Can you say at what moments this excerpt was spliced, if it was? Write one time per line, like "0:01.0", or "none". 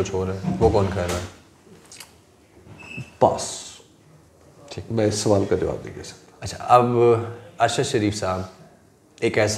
none